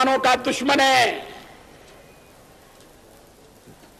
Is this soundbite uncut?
yes; 0 cuts

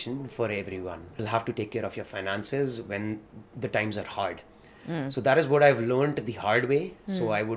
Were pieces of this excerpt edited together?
yes; 1 cut; at 1.2 s

